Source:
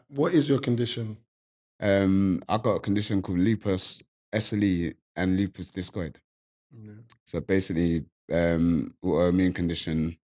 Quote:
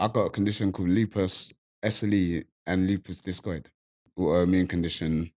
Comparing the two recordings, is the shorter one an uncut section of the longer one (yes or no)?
no